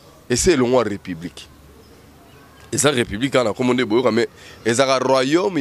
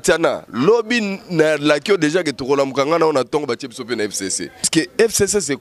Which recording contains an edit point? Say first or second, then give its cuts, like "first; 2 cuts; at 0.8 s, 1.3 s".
second; 1 cut; at 4.7 s